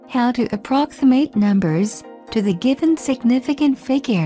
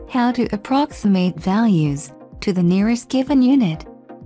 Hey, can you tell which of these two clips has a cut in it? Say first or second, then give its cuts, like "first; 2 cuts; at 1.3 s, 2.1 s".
first; 2 cuts; at 0.9 s, 2.6 s